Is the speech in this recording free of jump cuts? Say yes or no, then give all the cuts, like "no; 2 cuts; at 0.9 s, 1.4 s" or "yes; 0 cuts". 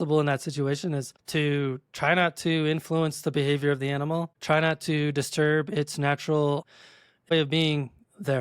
no; 3 cuts; at 1.2 s, 4.3 s, 6.8 s